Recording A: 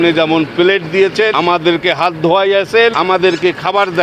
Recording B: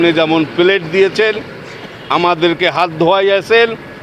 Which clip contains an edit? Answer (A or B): A